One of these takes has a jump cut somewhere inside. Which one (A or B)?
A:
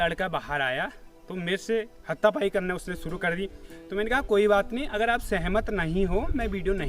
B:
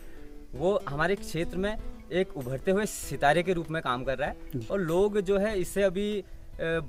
A